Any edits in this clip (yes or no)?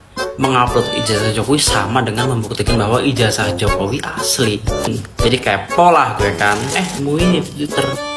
yes